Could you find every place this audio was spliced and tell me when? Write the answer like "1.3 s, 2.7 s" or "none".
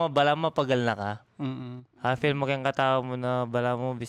none